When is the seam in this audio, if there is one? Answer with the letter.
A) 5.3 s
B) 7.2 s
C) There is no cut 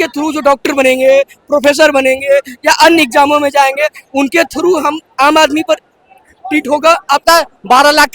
B